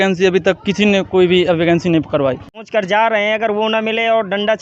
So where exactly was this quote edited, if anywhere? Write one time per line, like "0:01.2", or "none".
0:02.5